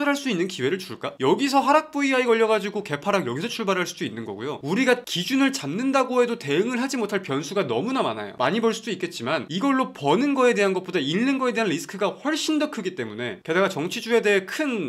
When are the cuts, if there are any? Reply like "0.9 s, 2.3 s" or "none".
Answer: 8.3 s